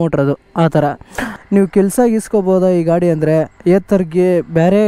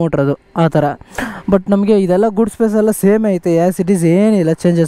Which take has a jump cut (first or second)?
first